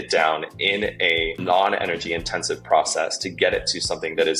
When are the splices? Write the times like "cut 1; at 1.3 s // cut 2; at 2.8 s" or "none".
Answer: cut 1; at 1.4 s